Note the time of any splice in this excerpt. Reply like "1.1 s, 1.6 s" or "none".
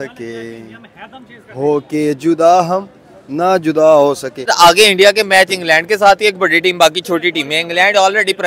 4.5 s